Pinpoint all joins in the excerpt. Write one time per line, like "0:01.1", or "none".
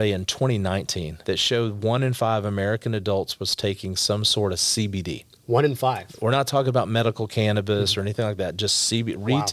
0:01.1